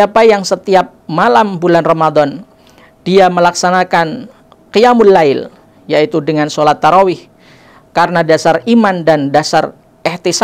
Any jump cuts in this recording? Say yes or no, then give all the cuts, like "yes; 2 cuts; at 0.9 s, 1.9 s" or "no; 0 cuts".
no; 0 cuts